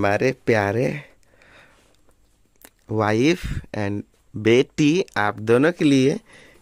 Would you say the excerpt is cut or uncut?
uncut